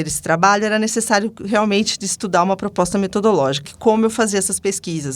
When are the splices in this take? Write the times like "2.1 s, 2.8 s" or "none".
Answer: 3.6 s